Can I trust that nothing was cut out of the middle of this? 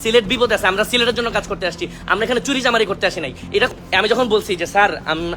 no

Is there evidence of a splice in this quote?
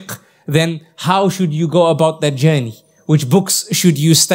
no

